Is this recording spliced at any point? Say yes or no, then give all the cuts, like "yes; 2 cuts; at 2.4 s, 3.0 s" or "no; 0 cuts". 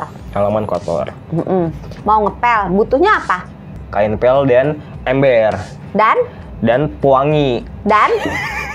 yes; 2 cuts; at 1.9 s, 3.8 s